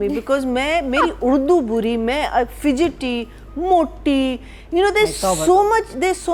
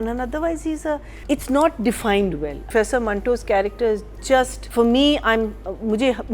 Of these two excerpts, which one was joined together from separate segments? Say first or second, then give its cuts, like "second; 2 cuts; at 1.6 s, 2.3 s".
second; 3 cuts; at 1.1 s, 2.6 s, 4.6 s